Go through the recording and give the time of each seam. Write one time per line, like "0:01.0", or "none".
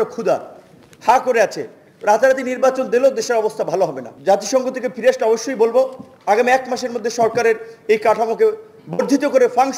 0:04.1